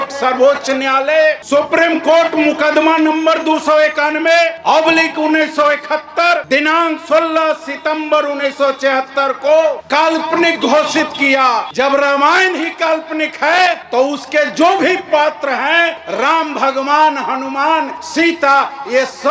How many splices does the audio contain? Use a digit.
8